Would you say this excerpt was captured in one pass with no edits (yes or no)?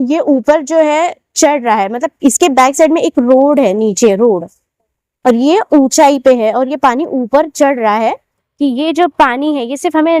no